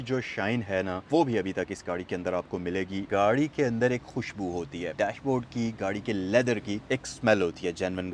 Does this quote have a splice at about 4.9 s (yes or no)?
yes